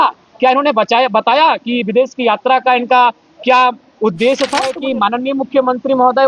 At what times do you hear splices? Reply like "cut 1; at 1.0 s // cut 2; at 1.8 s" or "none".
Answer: cut 1; at 4.8 s